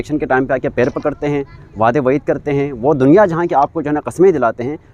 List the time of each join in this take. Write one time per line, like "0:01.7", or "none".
none